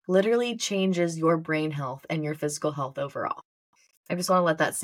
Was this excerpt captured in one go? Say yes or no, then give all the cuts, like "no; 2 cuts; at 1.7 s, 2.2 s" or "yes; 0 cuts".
yes; 0 cuts